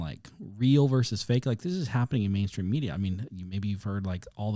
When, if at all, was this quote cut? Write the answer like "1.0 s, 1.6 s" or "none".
none